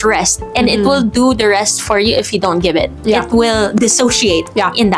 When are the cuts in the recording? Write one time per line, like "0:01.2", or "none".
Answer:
none